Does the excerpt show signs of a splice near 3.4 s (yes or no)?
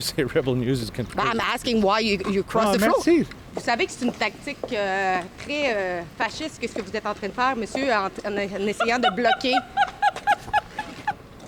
yes